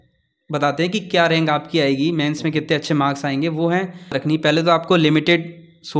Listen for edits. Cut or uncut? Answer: cut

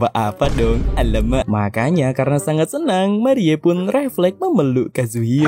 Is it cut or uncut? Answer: cut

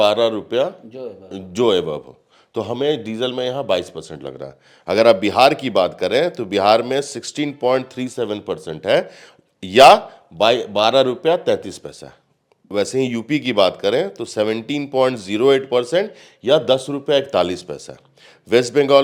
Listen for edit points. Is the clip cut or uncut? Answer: uncut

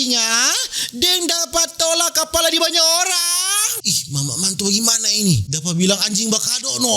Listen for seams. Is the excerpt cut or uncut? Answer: cut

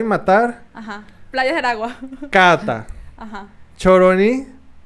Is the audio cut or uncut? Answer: uncut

